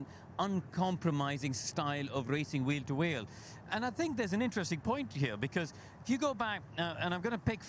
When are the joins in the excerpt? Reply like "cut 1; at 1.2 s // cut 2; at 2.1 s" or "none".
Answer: cut 1; at 2.7 s // cut 2; at 5.1 s